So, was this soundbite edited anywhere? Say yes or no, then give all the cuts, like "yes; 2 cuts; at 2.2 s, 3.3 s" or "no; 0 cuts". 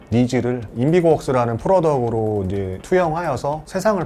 no; 0 cuts